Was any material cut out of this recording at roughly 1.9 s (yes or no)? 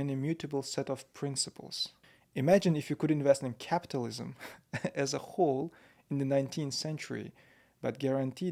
no